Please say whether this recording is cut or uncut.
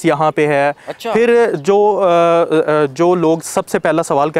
uncut